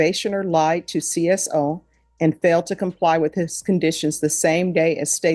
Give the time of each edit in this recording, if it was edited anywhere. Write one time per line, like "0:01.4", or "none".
none